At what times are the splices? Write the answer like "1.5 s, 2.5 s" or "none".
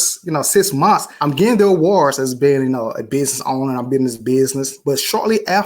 1.1 s, 4.7 s